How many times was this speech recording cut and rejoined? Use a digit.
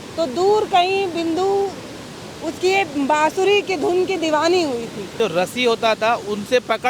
1